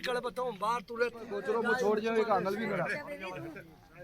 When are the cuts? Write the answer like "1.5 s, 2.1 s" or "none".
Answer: 1.4 s

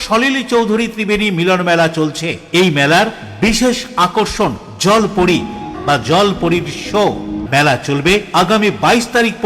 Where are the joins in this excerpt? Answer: 5.7 s, 7.4 s

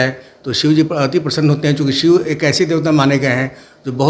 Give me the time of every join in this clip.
none

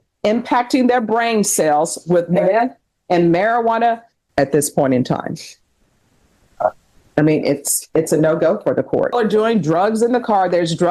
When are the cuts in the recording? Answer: 4.2 s, 9.1 s

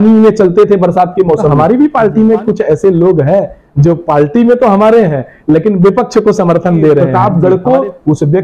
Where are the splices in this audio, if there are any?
1.5 s, 7.1 s

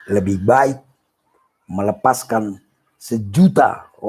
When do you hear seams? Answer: none

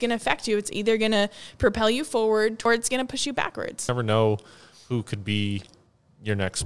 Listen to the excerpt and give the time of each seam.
2.6 s, 3.9 s

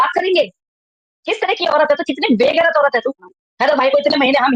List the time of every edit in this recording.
3.3 s

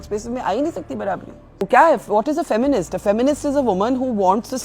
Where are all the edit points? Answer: 1.6 s

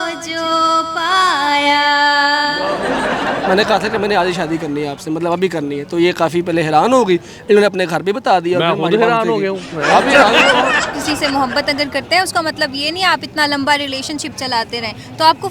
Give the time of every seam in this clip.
3.3 s, 10.9 s

